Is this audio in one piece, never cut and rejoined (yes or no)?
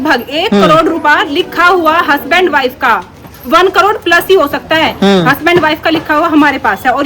yes